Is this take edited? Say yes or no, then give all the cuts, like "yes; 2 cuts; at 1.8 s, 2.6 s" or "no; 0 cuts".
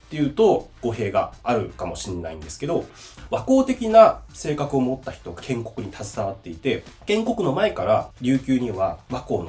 yes; 3 cuts; at 1.3 s, 6.9 s, 8.1 s